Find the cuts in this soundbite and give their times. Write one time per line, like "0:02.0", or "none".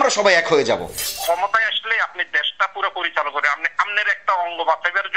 0:00.9